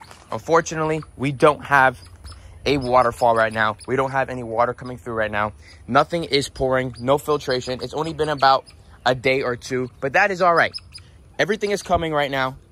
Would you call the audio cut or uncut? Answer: uncut